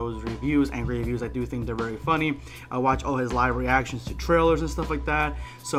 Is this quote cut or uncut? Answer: uncut